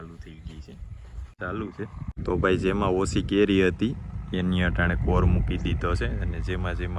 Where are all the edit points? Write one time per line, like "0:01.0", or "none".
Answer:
0:01.3